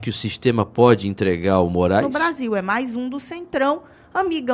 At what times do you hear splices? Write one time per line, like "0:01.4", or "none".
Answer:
0:02.0